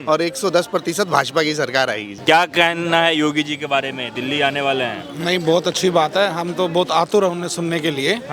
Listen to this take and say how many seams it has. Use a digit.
1